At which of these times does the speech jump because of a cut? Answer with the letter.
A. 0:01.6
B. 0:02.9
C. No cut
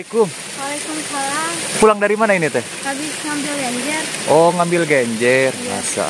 A